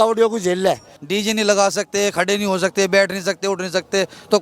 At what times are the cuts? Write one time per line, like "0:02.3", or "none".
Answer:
0:00.9